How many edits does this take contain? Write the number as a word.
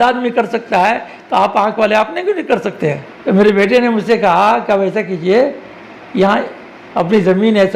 one